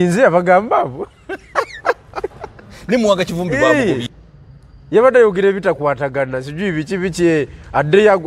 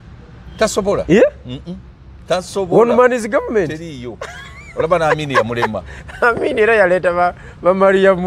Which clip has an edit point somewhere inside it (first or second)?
first